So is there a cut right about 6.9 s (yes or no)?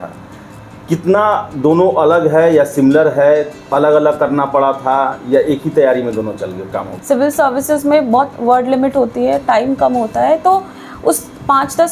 yes